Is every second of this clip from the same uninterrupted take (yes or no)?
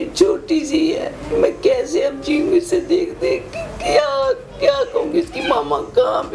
yes